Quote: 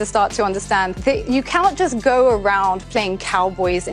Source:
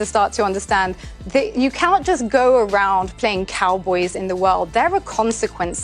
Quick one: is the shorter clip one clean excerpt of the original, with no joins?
no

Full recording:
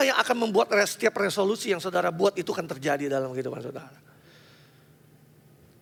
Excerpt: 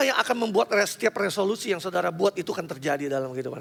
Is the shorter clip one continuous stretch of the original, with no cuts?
yes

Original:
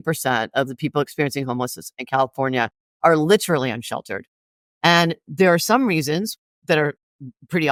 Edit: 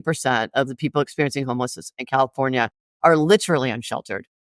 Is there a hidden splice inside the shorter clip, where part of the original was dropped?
no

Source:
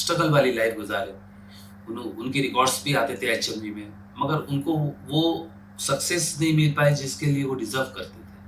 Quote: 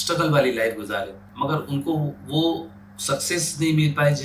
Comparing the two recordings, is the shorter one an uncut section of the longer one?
no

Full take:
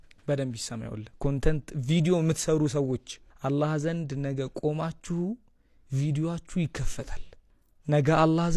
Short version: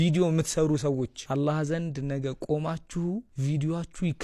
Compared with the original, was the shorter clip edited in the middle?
yes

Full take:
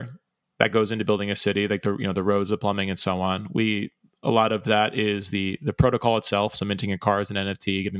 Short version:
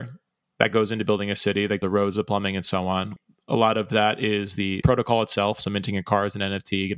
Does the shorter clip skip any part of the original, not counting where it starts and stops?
yes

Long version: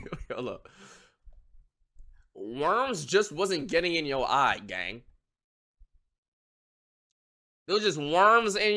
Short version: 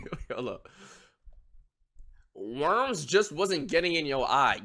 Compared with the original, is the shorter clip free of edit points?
yes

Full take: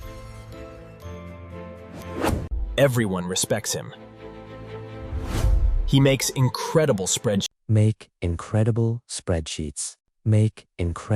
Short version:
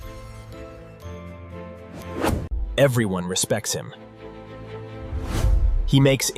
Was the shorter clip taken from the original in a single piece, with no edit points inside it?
yes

